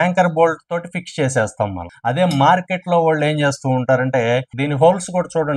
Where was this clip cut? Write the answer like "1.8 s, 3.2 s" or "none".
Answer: 1.9 s, 4.5 s